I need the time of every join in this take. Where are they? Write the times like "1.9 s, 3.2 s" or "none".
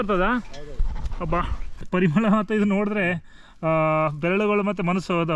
1.9 s